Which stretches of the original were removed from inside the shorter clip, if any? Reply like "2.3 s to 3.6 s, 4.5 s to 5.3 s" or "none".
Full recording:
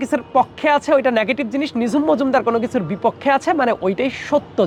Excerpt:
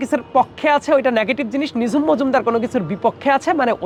none